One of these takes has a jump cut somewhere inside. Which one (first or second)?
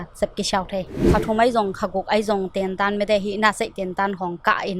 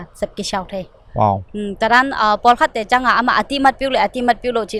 first